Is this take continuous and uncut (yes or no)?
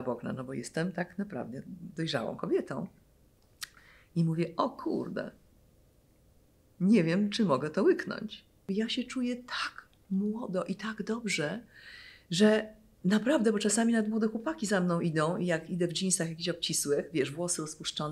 no